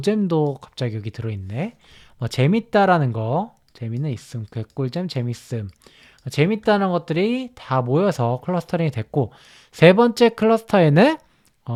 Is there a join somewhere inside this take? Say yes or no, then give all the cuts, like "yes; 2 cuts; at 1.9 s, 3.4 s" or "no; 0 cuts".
no; 0 cuts